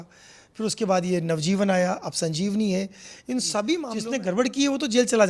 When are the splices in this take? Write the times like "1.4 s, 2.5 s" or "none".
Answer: 3.9 s